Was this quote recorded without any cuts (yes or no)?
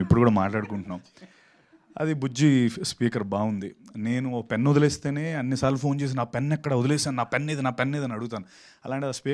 yes